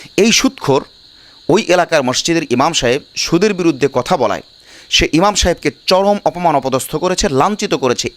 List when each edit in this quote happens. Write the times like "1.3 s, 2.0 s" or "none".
none